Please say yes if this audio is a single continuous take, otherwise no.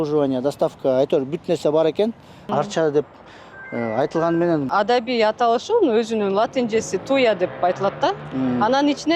no